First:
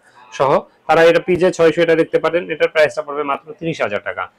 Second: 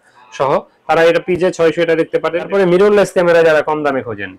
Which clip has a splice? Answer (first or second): second